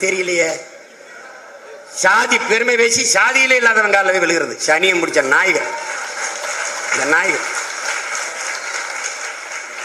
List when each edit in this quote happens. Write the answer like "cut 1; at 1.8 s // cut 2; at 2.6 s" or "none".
none